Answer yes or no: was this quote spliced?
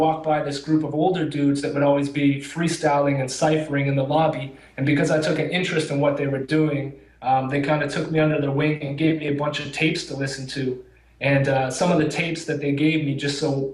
yes